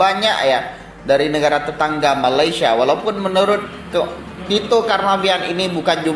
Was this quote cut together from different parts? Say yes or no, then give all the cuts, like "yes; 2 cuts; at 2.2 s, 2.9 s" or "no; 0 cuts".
no; 0 cuts